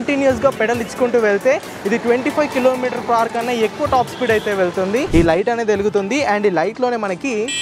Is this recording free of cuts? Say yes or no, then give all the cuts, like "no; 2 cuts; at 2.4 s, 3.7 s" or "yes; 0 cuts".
no; 1 cut; at 5.1 s